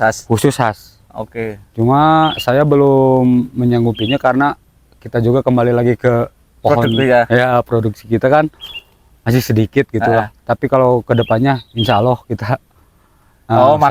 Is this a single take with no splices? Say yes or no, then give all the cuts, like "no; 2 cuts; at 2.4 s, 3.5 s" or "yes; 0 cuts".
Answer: yes; 0 cuts